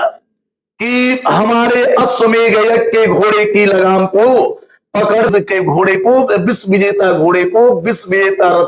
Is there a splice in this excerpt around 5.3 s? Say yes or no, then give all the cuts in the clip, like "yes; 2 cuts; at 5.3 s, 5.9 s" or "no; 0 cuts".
yes; 1 cut; at 5.3 s